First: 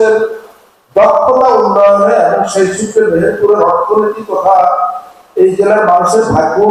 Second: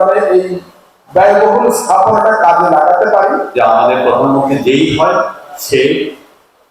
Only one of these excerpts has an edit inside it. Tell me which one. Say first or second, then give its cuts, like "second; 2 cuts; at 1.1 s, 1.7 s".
second; 1 cut; at 3.5 s